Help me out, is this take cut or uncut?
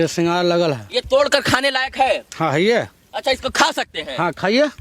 uncut